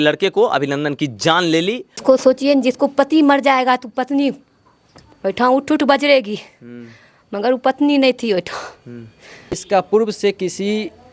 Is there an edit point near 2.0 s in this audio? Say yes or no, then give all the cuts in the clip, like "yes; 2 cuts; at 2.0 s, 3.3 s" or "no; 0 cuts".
yes; 2 cuts; at 2.0 s, 9.6 s